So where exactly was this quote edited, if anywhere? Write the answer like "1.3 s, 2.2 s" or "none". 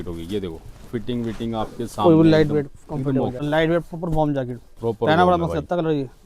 3.4 s